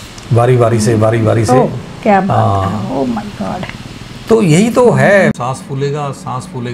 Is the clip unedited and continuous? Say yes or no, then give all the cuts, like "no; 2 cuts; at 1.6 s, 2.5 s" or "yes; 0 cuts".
no; 1 cut; at 5.4 s